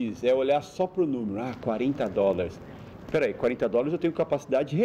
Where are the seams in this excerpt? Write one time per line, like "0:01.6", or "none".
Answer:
none